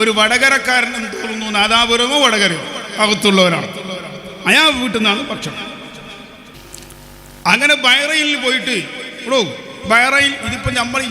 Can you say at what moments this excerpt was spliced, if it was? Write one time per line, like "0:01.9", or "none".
0:06.5